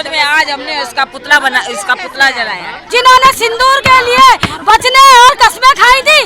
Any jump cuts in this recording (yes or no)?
yes